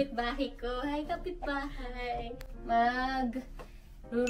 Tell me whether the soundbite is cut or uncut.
uncut